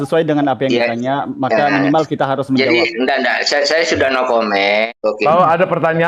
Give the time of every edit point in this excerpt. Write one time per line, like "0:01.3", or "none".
0:04.9